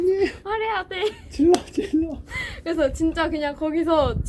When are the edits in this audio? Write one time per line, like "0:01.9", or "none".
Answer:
none